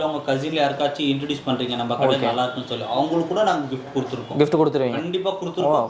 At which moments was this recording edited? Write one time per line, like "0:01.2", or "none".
none